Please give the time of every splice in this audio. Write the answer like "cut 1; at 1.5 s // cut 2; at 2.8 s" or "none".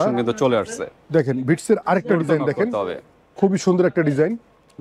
none